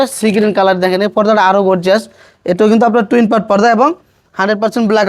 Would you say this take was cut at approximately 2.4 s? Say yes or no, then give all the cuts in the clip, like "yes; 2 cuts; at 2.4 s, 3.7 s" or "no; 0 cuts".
no; 0 cuts